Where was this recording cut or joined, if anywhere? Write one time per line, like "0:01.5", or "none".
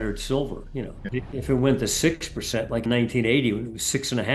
0:01.1
0:02.8